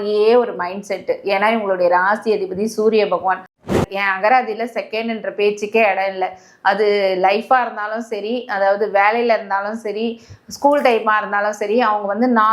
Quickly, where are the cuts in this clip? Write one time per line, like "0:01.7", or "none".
0:03.7